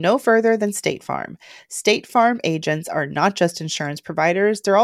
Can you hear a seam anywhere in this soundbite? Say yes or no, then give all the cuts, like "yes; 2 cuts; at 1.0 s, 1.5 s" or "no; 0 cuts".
no; 0 cuts